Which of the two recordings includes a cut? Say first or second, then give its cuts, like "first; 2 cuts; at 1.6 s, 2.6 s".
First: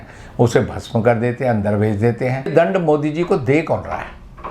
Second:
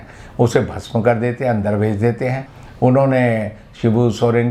first; 1 cut; at 2.5 s